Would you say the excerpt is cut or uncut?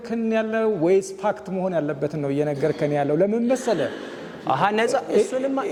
uncut